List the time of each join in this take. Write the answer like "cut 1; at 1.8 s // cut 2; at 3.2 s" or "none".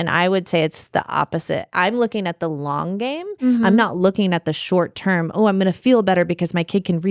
cut 1; at 1.7 s

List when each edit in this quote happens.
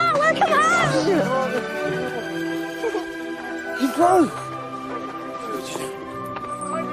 none

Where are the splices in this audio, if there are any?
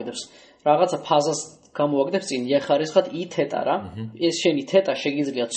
cut 1; at 4.0 s

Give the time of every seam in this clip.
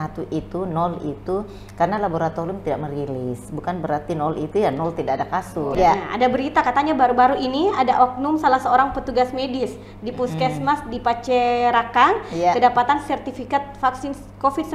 cut 1; at 5.7 s

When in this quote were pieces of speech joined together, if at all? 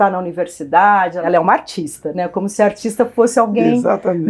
cut 1; at 1.2 s

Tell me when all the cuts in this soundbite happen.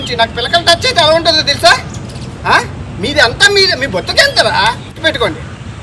cut 1; at 4.9 s

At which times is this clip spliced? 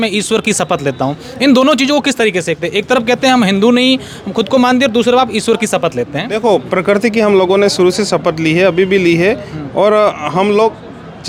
none

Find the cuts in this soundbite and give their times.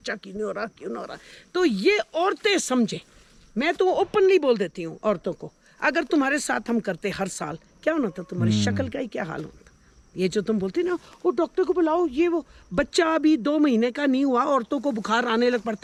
none

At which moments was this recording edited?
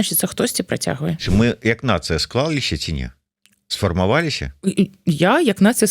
cut 1; at 1.2 s

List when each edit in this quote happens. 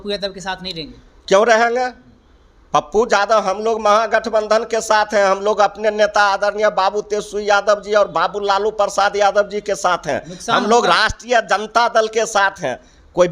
none

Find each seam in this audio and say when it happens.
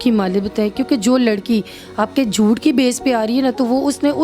none

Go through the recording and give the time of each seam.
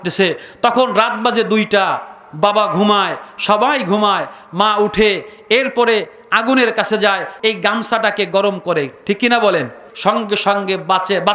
cut 1; at 7.3 s // cut 2; at 9.9 s

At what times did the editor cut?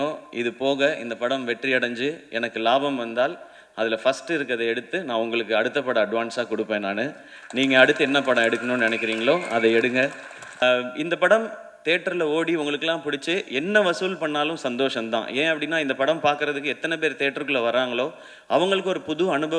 cut 1; at 10.6 s

